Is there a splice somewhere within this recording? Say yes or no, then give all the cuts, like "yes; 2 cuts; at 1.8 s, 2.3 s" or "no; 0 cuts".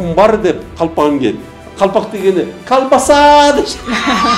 no; 0 cuts